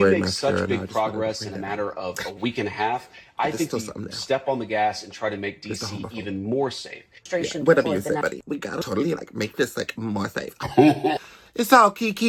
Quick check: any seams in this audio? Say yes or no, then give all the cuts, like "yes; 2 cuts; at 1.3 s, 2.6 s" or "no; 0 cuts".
no; 0 cuts